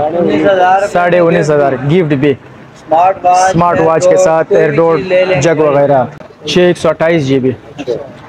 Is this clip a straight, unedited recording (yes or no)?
no